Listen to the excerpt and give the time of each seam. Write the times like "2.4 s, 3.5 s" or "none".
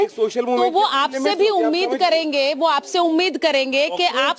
none